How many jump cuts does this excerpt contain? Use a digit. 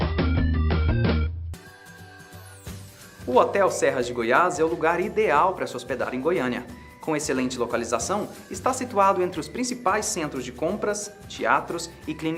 1